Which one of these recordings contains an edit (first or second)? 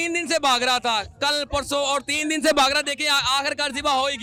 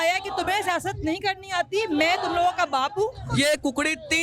second